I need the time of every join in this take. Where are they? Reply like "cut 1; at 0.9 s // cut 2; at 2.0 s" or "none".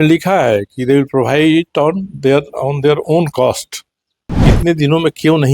cut 1; at 4.5 s